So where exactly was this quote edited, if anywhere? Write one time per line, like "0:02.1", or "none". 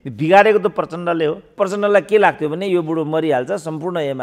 0:01.6